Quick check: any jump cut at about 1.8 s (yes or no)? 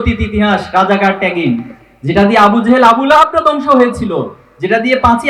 no